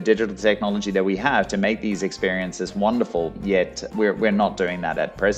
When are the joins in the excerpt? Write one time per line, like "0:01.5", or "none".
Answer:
0:03.8